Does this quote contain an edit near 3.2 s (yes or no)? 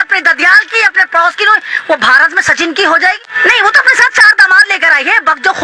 yes